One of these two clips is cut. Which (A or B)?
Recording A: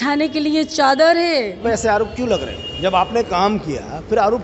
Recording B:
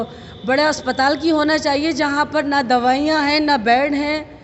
A